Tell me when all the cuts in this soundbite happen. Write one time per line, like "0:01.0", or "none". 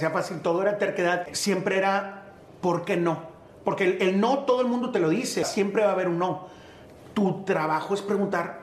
0:01.3
0:05.5